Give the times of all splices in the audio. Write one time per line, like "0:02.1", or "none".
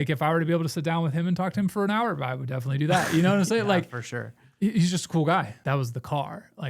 0:05.5